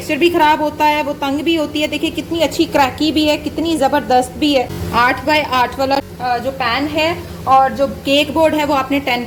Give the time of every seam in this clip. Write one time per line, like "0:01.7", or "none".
none